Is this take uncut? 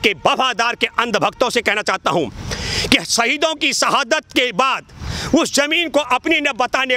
yes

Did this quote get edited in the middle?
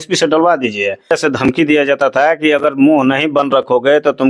yes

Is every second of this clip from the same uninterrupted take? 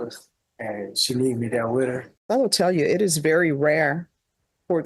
no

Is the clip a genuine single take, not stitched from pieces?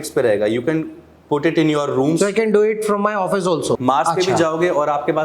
no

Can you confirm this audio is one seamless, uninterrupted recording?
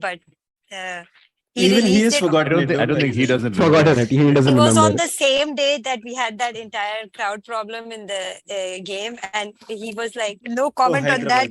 yes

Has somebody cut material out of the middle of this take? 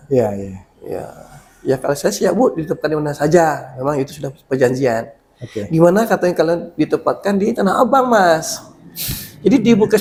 no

